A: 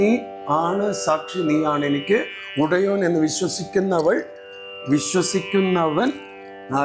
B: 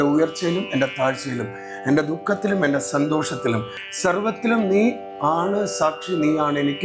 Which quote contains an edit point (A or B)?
B